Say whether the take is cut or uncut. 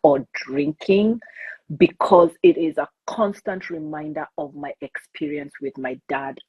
uncut